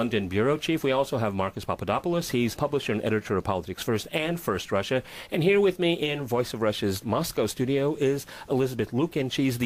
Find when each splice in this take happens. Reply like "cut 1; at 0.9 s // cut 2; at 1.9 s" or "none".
cut 1; at 8.6 s